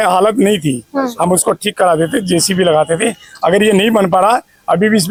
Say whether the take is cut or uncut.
uncut